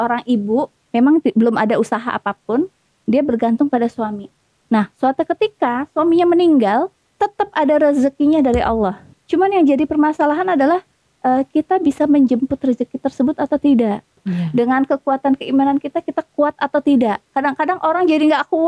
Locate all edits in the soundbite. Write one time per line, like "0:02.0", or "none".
0:07.1
0:09.1
0:14.2